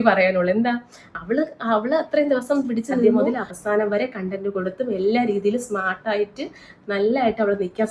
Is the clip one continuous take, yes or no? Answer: no